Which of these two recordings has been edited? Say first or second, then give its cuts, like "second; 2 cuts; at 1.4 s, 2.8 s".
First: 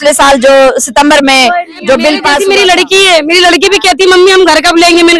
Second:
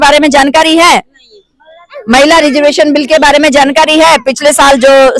first; 1 cut; at 2.4 s